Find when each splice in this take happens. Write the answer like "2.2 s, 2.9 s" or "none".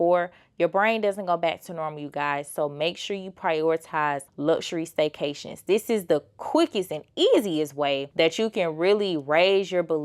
4.3 s, 8.1 s